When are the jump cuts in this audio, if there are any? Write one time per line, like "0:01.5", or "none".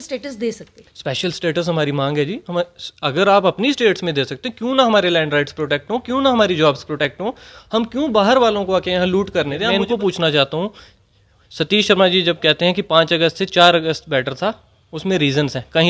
0:09.6